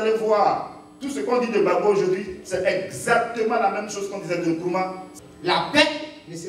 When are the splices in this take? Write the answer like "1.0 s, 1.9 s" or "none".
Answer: 5.0 s